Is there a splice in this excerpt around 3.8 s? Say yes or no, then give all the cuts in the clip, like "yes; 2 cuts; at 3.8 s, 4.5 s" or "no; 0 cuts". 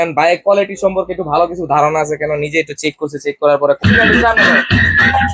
yes; 1 cut; at 3.8 s